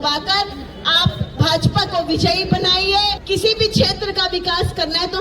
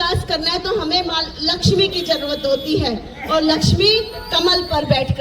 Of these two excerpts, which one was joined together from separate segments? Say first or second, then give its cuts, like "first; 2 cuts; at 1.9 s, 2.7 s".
first; 1 cut; at 3.2 s